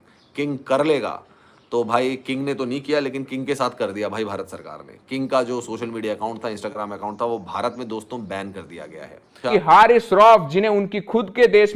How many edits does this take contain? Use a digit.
1